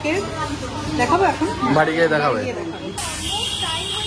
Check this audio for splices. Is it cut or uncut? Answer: cut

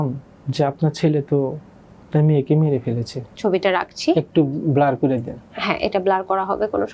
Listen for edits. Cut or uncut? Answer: cut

